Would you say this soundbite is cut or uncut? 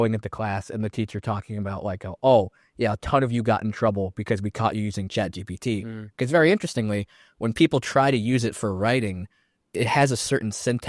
uncut